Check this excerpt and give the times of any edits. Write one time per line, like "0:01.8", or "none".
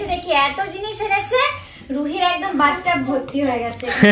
none